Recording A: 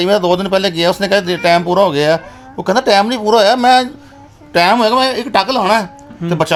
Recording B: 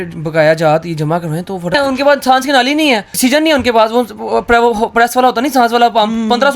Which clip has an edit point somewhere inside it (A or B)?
B